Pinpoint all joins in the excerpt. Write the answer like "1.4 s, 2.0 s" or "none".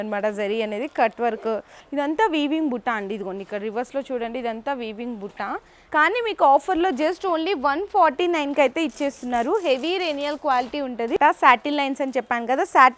1.8 s, 5.7 s, 11.2 s